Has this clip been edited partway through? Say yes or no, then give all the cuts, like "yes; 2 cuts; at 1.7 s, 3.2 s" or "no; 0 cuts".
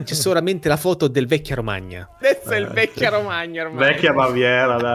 yes; 1 cut; at 2.2 s